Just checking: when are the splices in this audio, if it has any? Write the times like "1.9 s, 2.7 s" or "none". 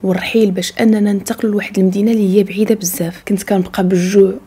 3.1 s